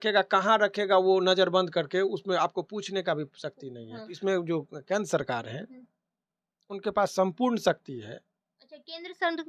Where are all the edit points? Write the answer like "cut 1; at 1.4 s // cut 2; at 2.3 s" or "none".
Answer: cut 1; at 4.2 s

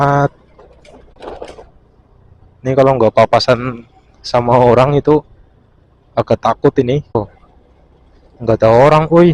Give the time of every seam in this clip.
cut 1; at 1.1 s // cut 2; at 7.2 s

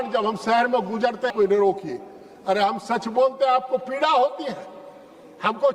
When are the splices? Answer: cut 1; at 1.3 s

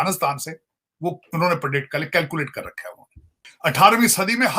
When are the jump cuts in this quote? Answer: cut 1; at 3.5 s

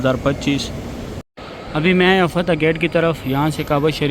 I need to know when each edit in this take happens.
cut 1; at 1.2 s

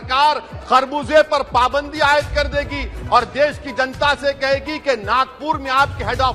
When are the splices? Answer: none

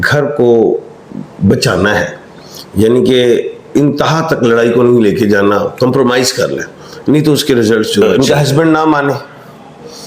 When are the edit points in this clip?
cut 1; at 8.0 s

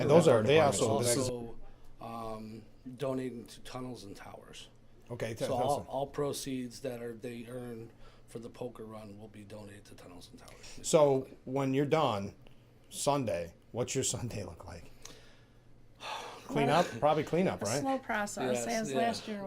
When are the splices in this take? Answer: cut 1; at 1.2 s

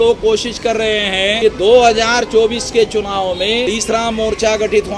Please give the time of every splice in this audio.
cut 1; at 1.4 s // cut 2; at 3.7 s

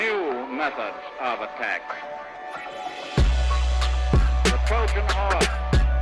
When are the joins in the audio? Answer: none

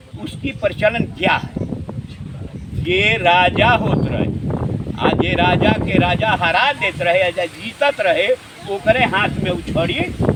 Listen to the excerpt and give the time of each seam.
none

